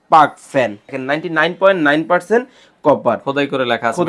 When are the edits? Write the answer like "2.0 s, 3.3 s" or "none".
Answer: 0.9 s